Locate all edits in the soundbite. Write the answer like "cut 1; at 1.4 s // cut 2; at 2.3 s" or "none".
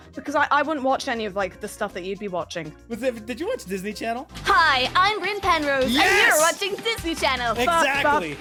none